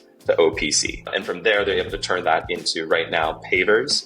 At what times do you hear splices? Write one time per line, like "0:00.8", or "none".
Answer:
0:01.1

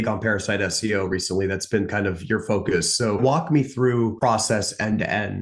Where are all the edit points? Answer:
0:03.2
0:04.2

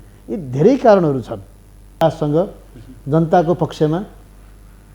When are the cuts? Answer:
0:02.0

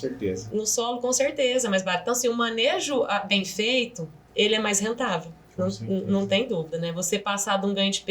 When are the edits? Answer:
0:04.2

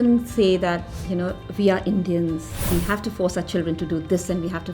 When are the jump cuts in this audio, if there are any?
0:02.5

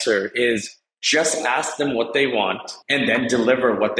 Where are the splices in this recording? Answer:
0:02.7

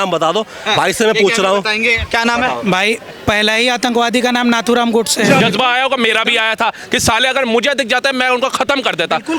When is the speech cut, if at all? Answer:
0:05.4

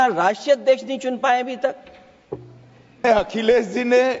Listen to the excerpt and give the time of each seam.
0:03.0

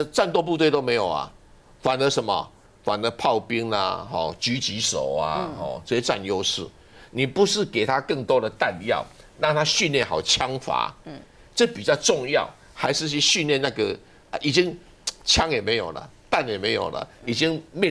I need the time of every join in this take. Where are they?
none

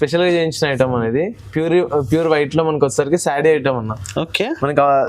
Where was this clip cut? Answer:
none

